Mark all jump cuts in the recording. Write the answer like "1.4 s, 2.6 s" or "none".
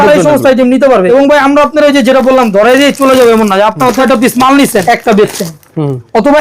1.1 s, 4.0 s, 4.8 s